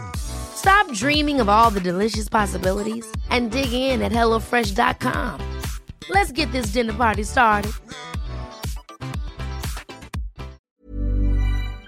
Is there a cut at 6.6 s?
no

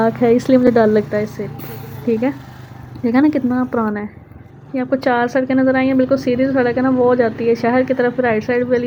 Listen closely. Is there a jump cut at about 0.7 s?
no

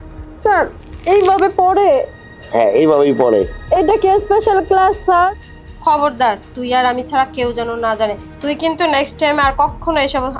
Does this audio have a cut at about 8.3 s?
yes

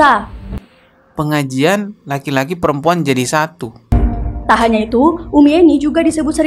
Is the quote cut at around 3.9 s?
yes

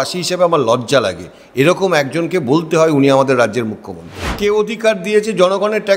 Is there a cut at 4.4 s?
yes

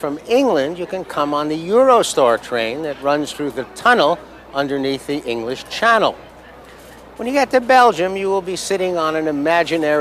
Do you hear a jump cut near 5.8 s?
no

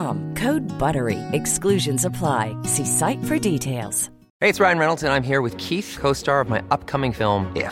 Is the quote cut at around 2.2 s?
no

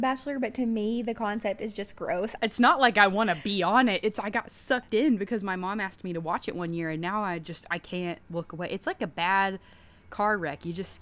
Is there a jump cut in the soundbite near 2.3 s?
yes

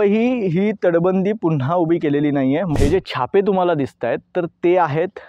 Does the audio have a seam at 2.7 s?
yes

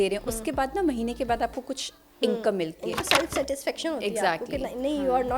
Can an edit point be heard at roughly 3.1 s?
yes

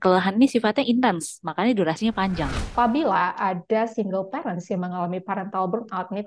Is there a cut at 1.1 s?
no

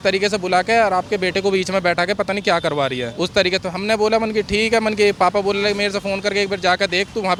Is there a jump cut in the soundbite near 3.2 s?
no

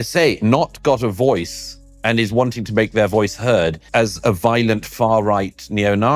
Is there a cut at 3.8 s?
yes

